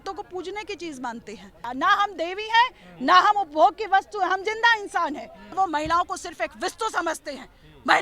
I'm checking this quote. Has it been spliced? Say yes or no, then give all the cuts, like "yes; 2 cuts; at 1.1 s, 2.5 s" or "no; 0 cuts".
yes; 2 cuts; at 1.6 s, 5.4 s